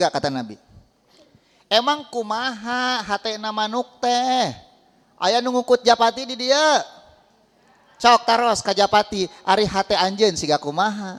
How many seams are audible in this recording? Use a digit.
0